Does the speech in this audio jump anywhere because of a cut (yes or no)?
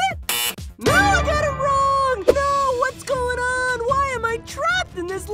yes